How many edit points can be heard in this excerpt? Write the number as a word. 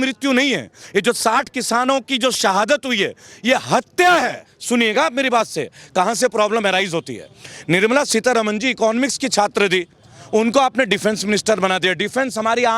one